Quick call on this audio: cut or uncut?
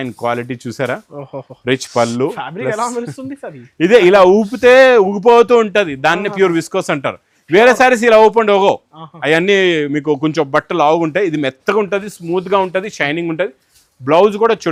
uncut